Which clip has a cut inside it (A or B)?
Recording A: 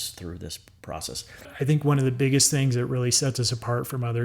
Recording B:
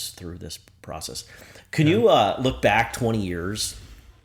A